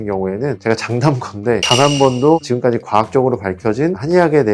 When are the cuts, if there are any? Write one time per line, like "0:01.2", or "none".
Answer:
none

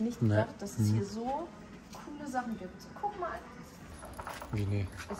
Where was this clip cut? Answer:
0:04.0

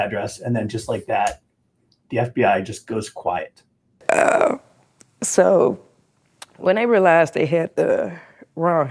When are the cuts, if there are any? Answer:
0:03.9

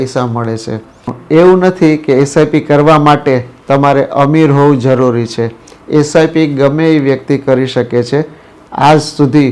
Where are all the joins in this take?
0:01.1
0:08.5

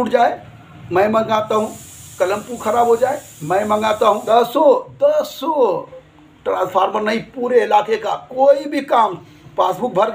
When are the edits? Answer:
0:04.2

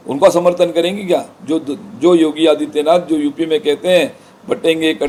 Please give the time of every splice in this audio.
none

